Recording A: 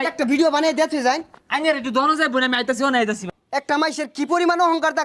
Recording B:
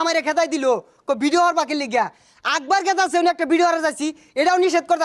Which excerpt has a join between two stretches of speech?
A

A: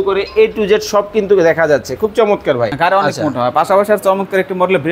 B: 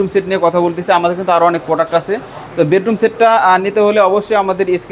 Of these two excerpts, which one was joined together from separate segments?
A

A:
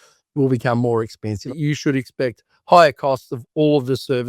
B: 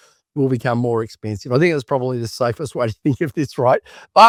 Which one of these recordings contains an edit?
A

